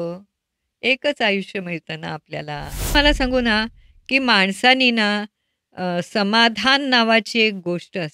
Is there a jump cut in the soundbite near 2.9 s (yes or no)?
yes